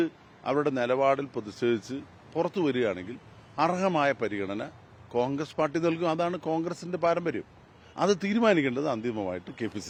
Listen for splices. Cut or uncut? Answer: uncut